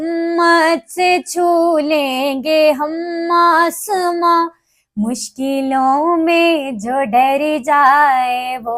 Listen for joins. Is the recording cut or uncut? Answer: uncut